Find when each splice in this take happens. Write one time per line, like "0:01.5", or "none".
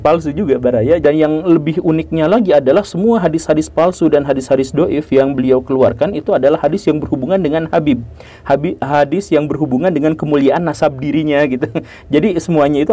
0:01.0